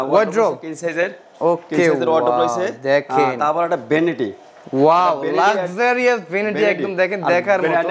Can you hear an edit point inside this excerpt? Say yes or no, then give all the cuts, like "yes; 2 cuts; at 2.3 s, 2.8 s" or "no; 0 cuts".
no; 0 cuts